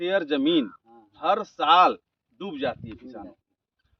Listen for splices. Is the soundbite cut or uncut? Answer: uncut